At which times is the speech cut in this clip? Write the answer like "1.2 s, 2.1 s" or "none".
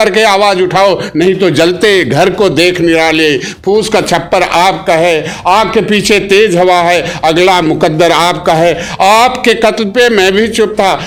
none